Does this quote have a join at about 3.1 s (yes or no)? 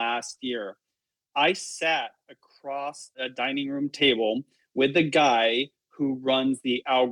yes